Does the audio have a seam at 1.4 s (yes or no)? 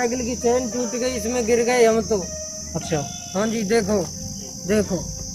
no